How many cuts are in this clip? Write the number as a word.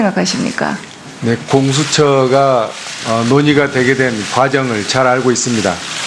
zero